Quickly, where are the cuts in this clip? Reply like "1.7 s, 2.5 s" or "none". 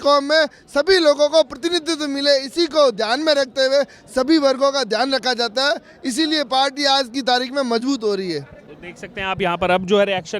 none

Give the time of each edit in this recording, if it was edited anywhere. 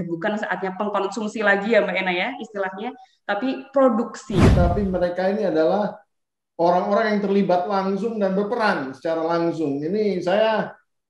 4.5 s

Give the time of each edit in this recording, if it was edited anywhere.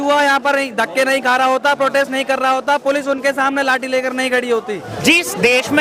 4.9 s

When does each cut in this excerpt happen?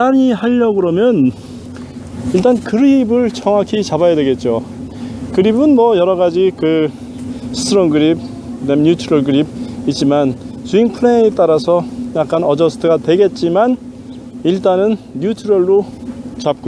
8.7 s

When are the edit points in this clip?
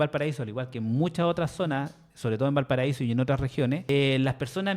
3.8 s

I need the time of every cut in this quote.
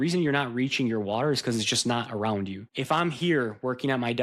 2.6 s

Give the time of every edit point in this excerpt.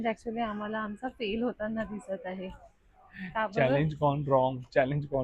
none

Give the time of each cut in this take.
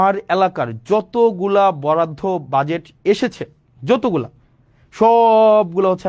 none

